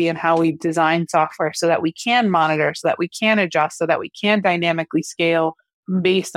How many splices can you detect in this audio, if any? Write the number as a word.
zero